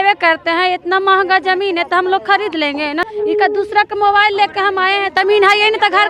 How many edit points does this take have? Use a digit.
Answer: 2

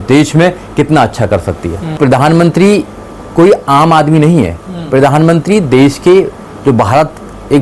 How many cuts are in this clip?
1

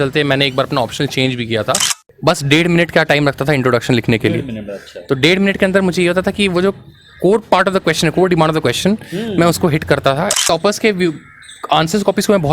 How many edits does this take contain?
2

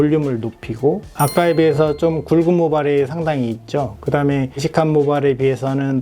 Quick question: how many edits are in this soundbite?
1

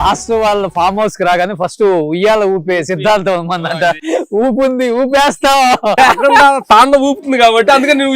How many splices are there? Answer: 2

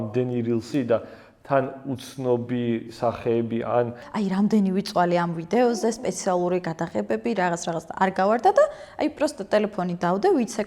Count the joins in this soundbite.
1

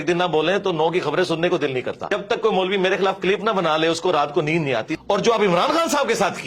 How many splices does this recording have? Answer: 2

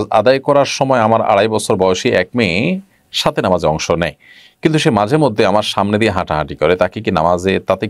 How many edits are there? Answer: 0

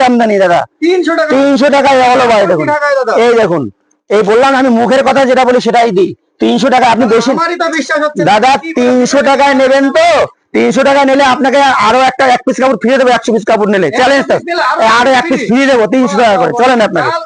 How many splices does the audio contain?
0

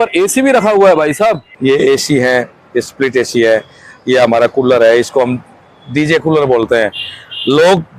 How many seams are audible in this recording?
1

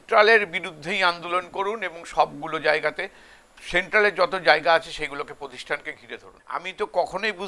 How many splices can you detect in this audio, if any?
1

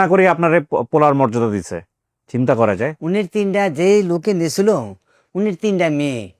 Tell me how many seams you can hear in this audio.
0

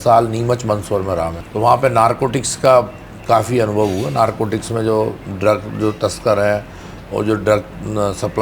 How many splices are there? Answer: 1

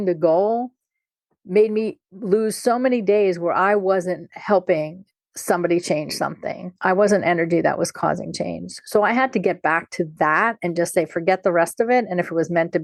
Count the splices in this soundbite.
0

